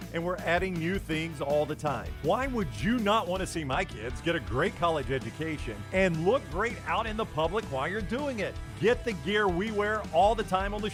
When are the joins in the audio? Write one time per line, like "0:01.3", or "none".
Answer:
none

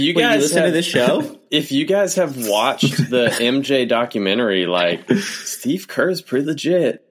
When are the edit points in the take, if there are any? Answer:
none

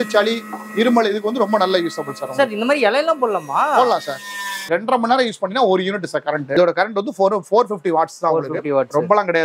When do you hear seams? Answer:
0:04.7
0:06.5

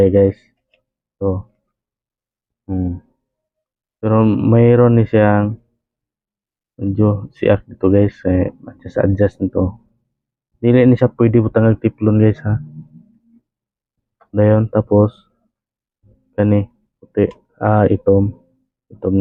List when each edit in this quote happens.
none

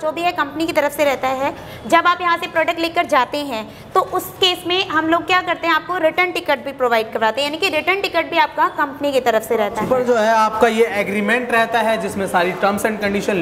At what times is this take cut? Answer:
0:09.8

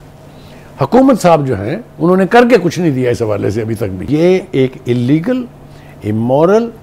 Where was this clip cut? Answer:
0:04.0

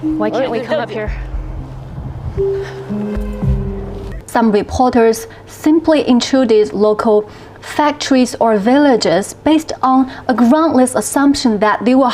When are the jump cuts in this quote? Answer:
0:04.1

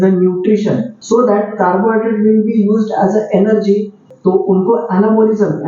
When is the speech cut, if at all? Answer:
0:00.9
0:04.1

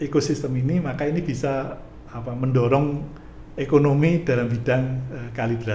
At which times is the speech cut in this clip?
none

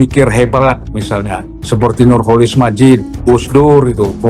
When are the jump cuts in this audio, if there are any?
0:00.9
0:03.1

